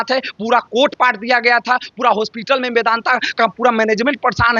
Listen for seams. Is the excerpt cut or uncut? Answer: uncut